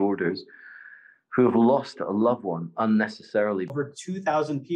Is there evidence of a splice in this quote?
yes; 1 cut; at 3.7 s

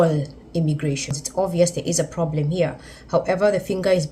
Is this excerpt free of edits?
no; 1 cut; at 1.2 s

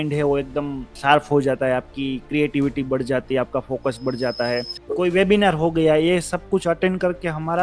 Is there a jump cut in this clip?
yes; 2 cuts; at 0.9 s, 4.8 s

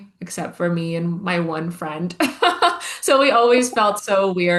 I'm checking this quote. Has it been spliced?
no; 0 cuts

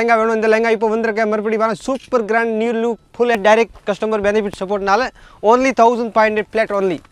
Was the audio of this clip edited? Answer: yes; 1 cut; at 3.4 s

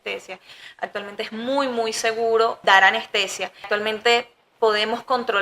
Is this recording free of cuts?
no; 2 cuts; at 2.6 s, 3.7 s

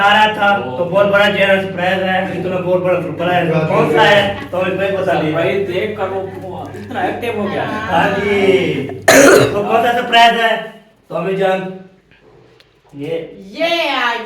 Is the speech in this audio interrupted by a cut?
no; 0 cuts

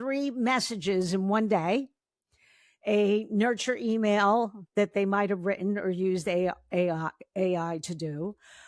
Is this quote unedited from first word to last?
yes; 0 cuts

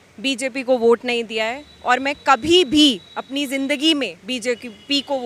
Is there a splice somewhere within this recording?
no; 0 cuts

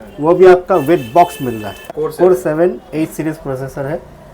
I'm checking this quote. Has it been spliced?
yes; 1 cut; at 1.9 s

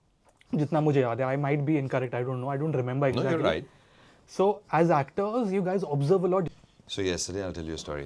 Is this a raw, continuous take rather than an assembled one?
no; 1 cut; at 6.5 s

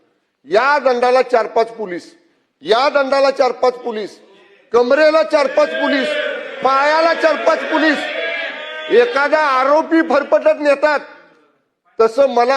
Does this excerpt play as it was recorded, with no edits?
yes; 0 cuts

